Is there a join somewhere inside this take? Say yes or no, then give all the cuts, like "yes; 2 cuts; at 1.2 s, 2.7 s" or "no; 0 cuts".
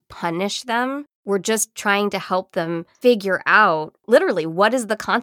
yes; 3 cuts; at 1.1 s, 2.9 s, 3.9 s